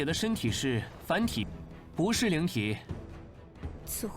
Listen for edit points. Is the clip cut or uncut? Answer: cut